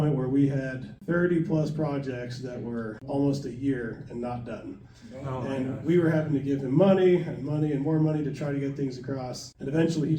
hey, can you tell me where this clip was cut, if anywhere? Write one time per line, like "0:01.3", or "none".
none